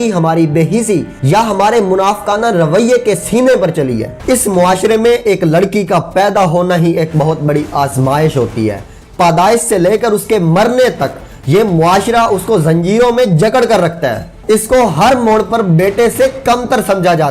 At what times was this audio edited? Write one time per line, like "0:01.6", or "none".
0:04.1